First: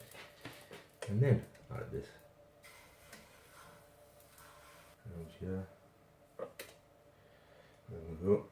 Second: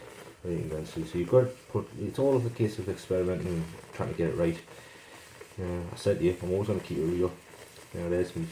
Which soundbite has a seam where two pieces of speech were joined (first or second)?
first